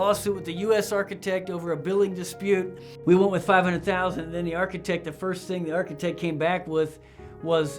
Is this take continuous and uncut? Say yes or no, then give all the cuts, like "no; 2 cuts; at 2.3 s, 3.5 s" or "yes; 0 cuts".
no; 1 cut; at 2.8 s